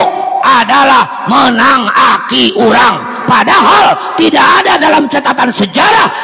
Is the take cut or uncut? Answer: uncut